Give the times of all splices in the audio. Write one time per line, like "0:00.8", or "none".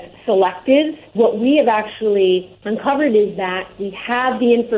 0:01.1
0:02.6